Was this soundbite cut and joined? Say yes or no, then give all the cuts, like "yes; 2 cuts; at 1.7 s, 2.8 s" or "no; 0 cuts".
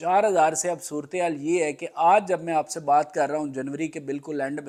no; 0 cuts